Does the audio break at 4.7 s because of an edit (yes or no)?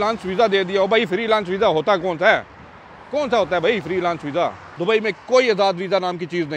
yes